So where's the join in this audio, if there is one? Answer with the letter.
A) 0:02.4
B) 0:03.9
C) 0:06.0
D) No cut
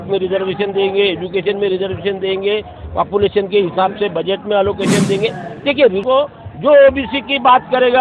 C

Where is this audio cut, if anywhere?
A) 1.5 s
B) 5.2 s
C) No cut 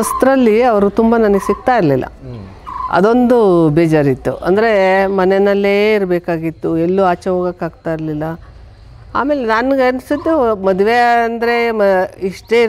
C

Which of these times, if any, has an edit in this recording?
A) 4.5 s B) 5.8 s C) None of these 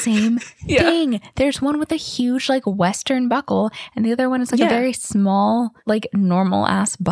B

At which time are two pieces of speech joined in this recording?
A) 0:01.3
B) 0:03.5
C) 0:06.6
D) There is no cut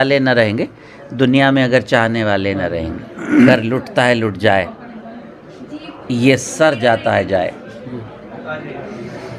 B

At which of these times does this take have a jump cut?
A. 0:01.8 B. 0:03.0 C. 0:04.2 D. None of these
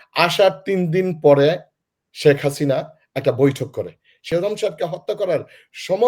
C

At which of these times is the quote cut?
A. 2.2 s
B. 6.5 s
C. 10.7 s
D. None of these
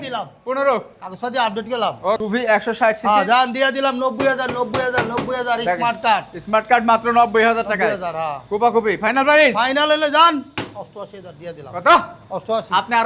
A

